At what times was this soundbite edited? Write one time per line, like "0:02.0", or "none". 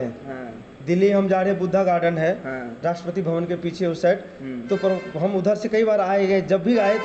none